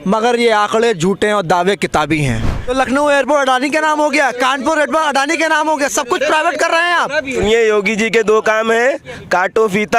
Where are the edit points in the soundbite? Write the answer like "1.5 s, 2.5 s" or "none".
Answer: 2.7 s, 7.3 s